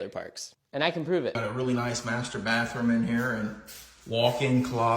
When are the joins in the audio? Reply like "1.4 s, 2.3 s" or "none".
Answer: 1.4 s